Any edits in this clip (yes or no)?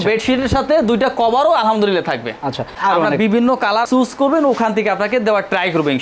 yes